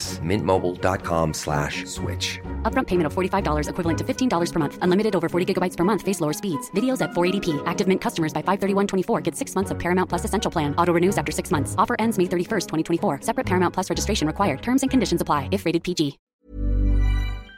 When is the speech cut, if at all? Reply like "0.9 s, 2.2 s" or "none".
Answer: 16.2 s